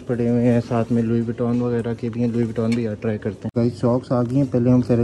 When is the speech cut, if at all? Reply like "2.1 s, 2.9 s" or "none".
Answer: none